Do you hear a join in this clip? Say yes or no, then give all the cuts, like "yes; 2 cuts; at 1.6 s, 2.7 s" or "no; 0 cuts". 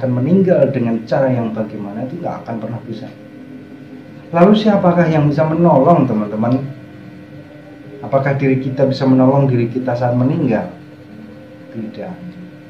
no; 0 cuts